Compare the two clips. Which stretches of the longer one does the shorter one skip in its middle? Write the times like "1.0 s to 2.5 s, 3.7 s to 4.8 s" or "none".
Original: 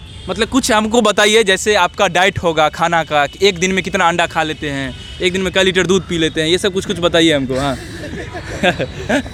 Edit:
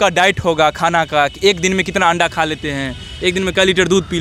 none

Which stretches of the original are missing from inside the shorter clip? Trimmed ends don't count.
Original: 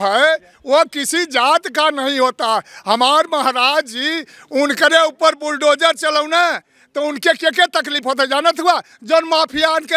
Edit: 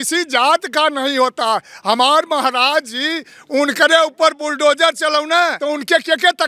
6.6 s to 6.9 s

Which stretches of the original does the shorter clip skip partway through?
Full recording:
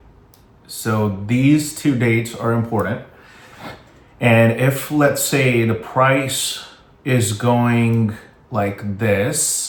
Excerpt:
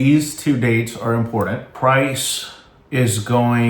3.1 s to 5.9 s

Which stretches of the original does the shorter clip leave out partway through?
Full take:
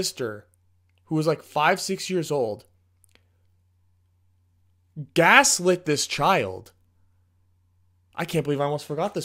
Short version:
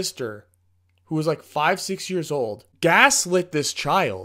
2.6 s to 5.0 s

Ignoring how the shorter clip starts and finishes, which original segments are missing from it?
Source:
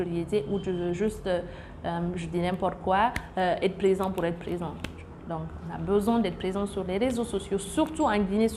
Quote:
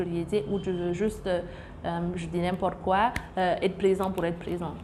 none

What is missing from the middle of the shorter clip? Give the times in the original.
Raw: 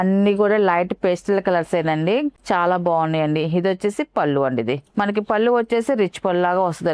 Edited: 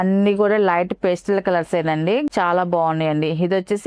2.3 s to 2.4 s

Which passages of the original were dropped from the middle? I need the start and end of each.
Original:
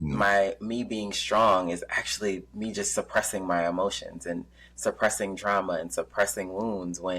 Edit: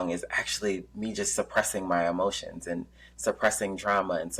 none

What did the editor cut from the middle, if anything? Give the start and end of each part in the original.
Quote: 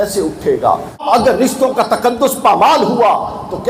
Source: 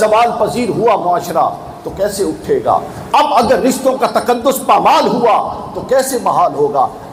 3.1 s to 3.3 s

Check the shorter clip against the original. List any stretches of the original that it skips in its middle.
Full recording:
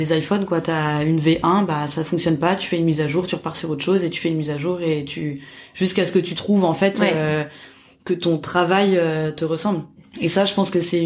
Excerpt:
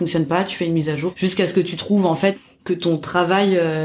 3.3 s to 5.7 s, 6.9 s to 7.8 s

